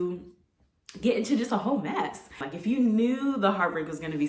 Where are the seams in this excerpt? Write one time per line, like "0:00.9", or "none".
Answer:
0:02.5